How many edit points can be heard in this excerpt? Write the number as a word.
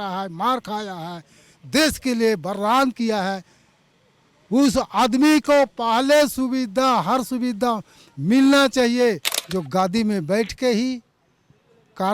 one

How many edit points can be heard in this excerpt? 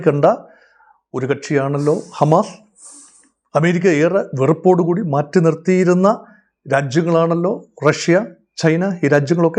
zero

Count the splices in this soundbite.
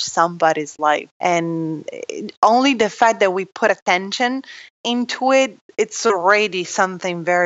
zero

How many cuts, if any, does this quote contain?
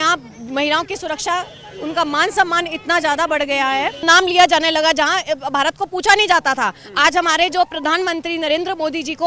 one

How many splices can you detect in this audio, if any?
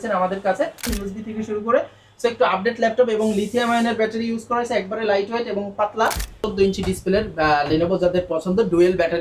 two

